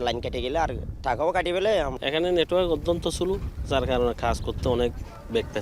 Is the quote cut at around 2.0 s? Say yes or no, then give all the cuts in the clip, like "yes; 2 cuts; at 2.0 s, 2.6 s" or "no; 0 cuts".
yes; 1 cut; at 2.0 s